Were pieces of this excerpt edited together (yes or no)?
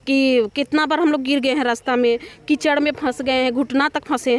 no